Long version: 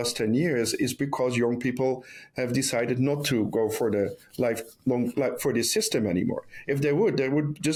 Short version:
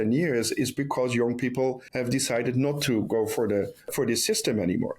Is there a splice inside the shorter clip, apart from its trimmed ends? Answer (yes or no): yes